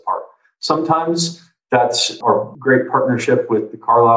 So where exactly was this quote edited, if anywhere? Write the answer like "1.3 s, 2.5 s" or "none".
2.2 s